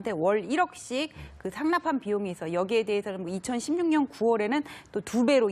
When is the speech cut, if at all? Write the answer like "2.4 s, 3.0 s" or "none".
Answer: 3.1 s